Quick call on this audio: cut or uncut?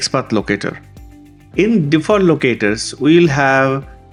uncut